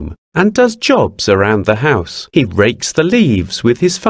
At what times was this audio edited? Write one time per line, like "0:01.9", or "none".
0:02.2